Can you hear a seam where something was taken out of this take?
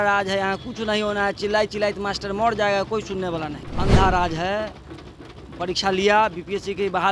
yes; 1 cut; at 3.6 s

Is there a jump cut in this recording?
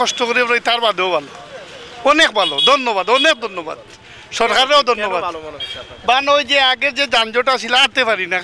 no; 0 cuts

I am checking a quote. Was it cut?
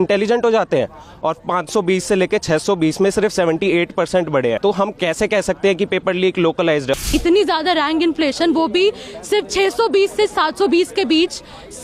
yes; 2 cuts; at 4.6 s, 7.0 s

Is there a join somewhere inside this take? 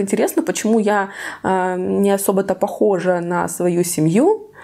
no; 0 cuts

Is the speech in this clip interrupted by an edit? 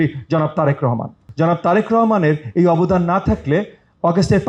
yes; 1 cut; at 1.2 s

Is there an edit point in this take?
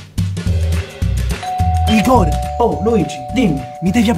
no; 0 cuts

